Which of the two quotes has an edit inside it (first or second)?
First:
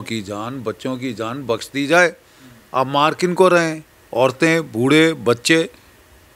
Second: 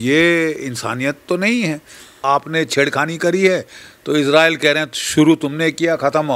second